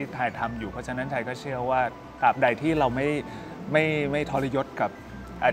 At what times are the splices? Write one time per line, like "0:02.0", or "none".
none